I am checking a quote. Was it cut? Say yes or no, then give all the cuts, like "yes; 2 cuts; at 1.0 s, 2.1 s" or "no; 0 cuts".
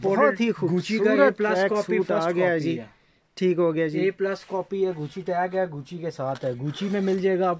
no; 0 cuts